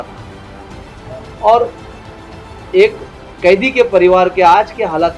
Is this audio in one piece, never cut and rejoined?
yes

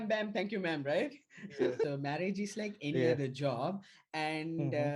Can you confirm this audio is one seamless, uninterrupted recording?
no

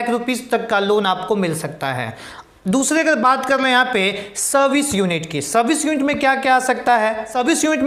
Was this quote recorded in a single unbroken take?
yes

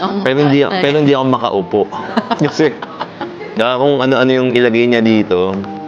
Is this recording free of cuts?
yes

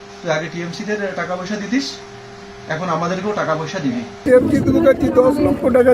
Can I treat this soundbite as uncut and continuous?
no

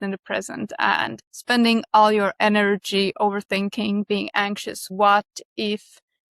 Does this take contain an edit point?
yes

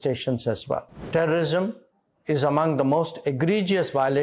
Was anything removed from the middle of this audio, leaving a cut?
yes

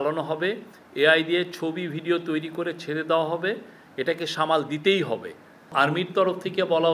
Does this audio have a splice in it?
yes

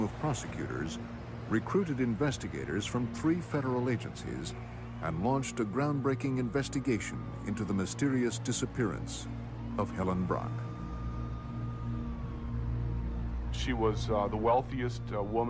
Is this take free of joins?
yes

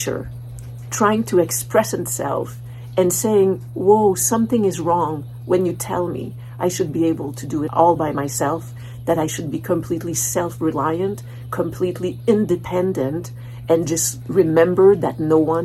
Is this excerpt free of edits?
yes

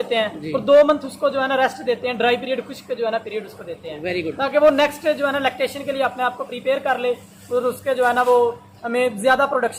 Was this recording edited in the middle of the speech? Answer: no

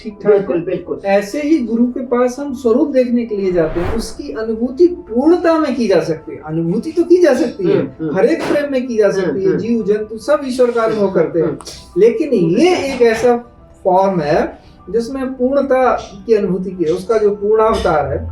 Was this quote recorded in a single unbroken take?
no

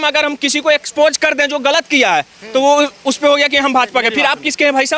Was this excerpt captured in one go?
yes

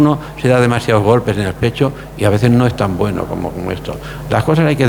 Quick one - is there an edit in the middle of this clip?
no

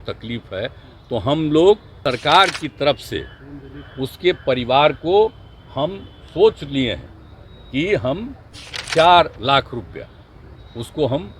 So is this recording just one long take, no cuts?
no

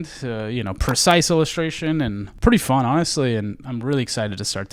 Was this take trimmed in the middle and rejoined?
yes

